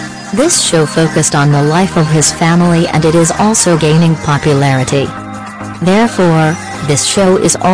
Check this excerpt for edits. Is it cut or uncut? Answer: cut